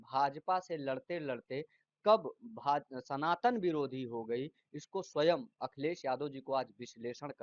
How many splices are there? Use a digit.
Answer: 0